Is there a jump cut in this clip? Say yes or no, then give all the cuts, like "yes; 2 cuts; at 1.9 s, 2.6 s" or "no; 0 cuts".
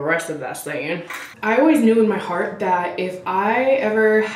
yes; 1 cut; at 1.3 s